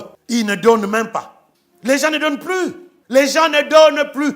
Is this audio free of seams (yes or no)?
no